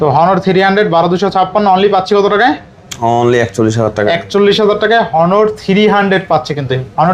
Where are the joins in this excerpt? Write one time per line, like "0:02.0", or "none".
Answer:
none